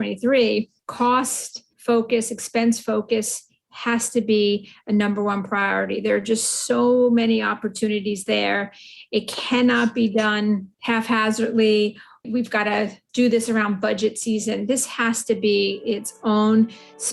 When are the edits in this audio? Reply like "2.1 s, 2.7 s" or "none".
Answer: 10.7 s